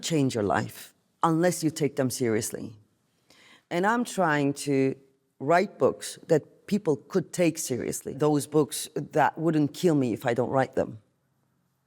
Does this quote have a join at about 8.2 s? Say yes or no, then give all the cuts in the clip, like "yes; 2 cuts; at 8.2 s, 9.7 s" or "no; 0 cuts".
yes; 1 cut; at 8.2 s